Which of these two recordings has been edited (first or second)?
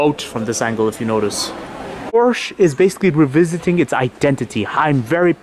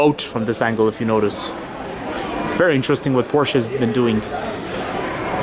first